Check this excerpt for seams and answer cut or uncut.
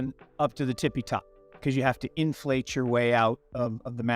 cut